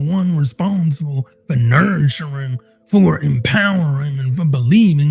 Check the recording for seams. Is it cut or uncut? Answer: uncut